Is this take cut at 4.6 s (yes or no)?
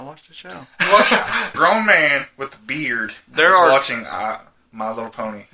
no